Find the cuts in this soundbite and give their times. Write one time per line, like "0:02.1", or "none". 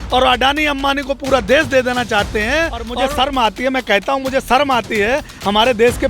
0:02.9